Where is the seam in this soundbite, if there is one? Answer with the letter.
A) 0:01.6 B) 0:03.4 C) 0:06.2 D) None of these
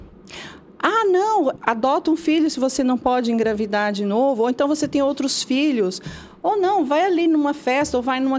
A